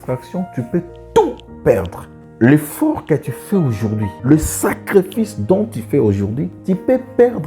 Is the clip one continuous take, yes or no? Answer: no